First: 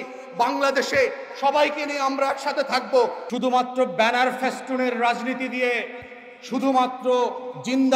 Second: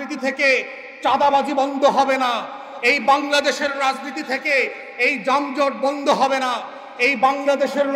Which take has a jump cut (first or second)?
first